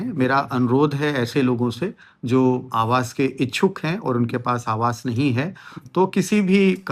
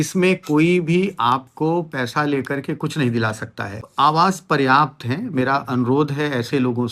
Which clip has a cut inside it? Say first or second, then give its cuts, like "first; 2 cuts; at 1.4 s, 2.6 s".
second; 1 cut; at 3.8 s